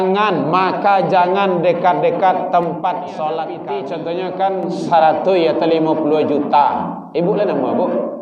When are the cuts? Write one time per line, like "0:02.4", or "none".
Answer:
0:03.6